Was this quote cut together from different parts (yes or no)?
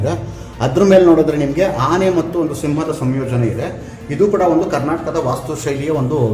no